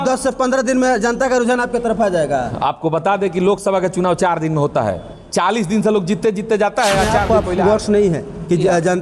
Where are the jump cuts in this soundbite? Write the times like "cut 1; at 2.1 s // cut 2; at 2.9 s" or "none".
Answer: cut 1; at 7.2 s